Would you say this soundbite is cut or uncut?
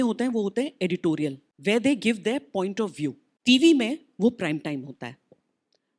cut